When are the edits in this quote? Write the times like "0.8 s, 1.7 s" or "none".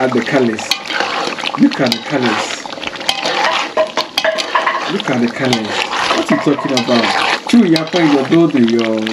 none